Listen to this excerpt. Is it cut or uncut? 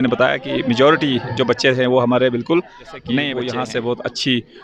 cut